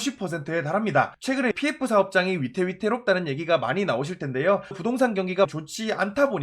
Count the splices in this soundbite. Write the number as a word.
three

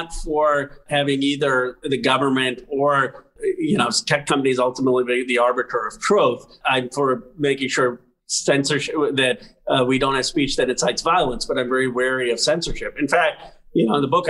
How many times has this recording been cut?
three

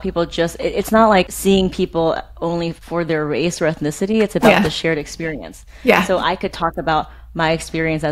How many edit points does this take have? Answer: two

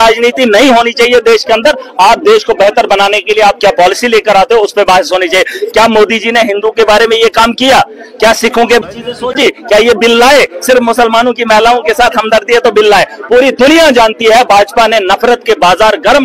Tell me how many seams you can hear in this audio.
zero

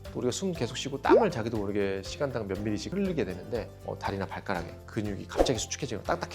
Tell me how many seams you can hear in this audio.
one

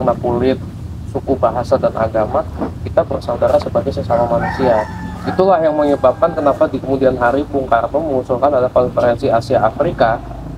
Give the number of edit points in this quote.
zero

